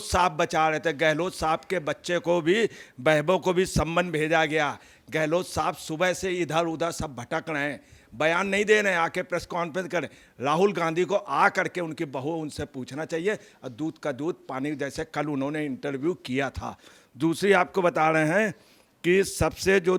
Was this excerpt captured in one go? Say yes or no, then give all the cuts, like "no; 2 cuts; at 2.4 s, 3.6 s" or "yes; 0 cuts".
yes; 0 cuts